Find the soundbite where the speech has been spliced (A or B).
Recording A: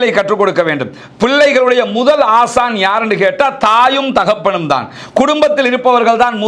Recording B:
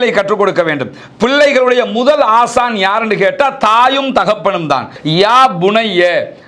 B